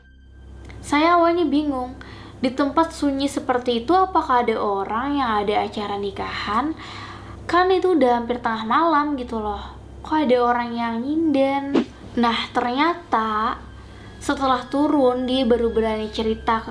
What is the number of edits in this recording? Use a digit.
1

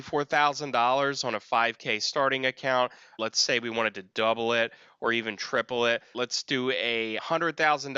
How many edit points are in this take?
2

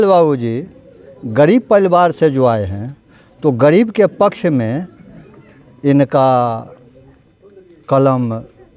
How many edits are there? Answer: 0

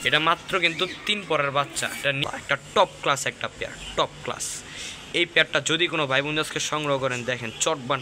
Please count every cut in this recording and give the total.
1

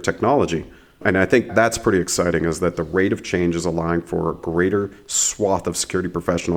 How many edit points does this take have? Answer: 1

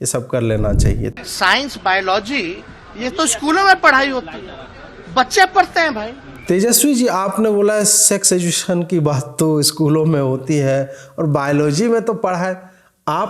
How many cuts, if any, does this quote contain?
2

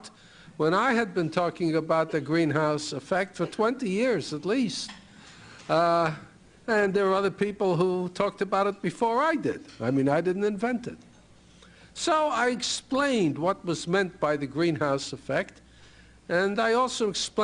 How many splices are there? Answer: 1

